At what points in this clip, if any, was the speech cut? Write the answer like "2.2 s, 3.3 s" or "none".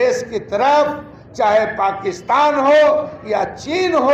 none